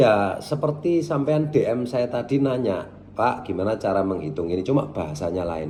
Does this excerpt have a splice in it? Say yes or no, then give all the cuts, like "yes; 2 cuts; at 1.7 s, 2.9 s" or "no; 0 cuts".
no; 0 cuts